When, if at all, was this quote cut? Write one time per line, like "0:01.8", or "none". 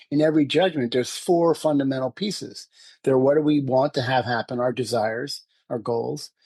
none